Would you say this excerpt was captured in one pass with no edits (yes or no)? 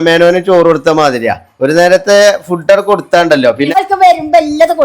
no